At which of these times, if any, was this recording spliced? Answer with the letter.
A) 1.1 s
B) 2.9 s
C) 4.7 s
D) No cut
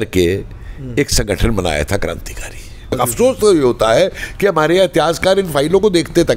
B